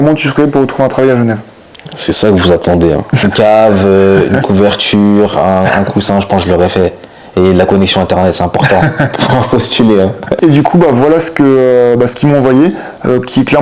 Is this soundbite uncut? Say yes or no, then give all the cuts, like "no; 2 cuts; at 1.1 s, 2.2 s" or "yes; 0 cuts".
no; 2 cuts; at 3.2 s, 10.4 s